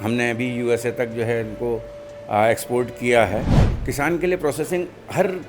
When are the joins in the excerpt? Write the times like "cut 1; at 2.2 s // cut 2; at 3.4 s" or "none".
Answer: cut 1; at 3.6 s